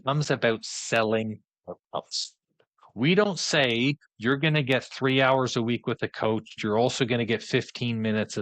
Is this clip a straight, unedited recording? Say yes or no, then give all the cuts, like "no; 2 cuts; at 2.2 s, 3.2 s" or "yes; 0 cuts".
no; 1 cut; at 6.6 s